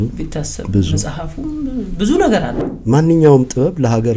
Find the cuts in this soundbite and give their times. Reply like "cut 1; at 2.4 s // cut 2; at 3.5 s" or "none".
cut 1; at 2.5 s